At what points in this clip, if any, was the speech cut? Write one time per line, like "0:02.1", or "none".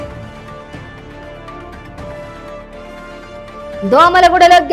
0:01.1